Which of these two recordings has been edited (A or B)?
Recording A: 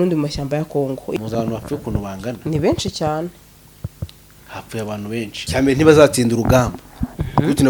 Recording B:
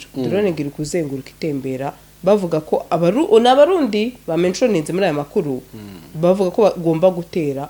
A